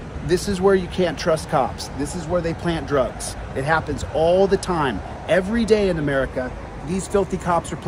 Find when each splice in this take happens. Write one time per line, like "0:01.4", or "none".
none